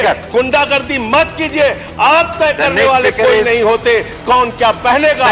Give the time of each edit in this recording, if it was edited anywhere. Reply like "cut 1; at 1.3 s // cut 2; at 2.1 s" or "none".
none